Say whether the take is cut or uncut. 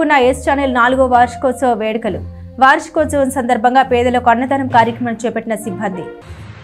uncut